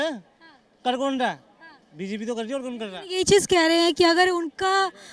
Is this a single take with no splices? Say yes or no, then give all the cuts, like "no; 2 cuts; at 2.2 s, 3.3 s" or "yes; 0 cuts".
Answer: yes; 0 cuts